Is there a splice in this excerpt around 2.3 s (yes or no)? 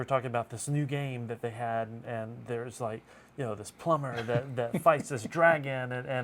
no